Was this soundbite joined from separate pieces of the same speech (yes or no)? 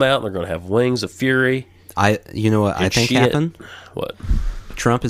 no